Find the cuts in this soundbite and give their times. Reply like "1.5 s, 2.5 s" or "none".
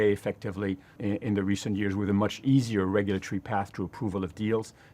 0.9 s